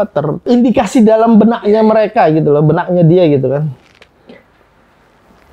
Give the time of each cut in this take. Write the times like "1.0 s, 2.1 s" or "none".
none